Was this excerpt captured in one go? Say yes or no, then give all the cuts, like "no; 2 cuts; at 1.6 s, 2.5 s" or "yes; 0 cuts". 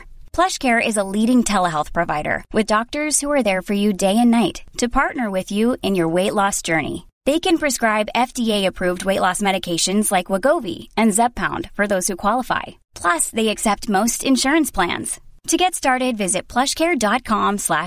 yes; 0 cuts